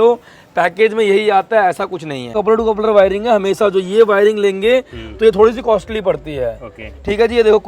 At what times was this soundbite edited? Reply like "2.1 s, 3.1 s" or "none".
2.3 s